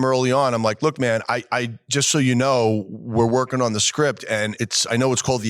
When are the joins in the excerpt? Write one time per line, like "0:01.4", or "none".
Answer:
0:04.6